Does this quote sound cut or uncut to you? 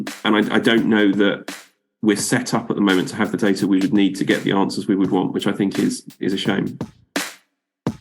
cut